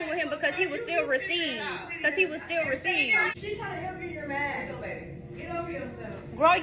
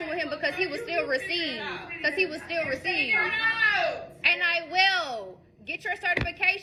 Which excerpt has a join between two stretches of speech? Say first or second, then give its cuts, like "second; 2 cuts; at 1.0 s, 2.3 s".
first; 1 cut; at 3.4 s